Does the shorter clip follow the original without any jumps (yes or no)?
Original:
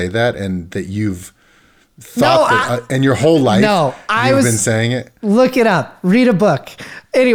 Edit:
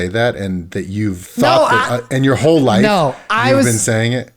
no